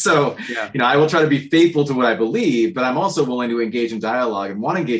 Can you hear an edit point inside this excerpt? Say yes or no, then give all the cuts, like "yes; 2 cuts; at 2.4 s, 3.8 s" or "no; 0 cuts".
no; 0 cuts